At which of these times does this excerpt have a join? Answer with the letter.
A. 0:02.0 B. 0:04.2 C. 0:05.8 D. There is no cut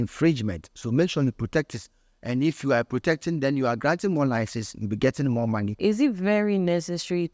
C